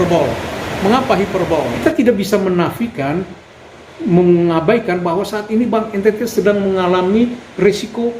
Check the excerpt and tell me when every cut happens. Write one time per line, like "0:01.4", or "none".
0:01.8